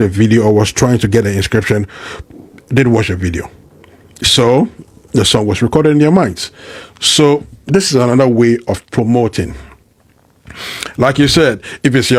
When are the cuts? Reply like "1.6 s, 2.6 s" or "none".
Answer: none